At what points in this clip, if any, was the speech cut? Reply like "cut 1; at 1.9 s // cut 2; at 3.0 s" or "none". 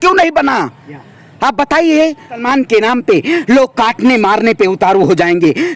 cut 1; at 2.4 s